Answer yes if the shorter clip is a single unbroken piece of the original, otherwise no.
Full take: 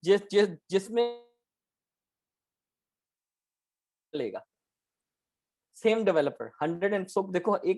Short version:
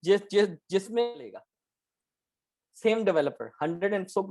no